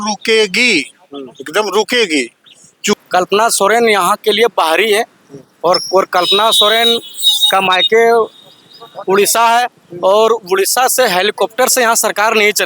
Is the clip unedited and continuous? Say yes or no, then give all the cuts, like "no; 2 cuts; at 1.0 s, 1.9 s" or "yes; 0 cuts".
no; 1 cut; at 3.0 s